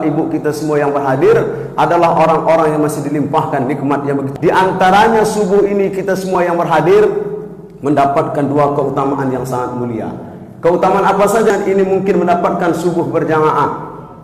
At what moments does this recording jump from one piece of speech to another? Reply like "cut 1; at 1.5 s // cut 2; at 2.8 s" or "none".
cut 1; at 4.3 s // cut 2; at 11.5 s